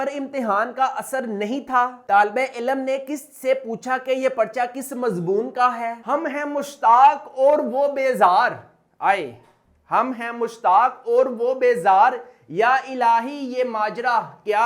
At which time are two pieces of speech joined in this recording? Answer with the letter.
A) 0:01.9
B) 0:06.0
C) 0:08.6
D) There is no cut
B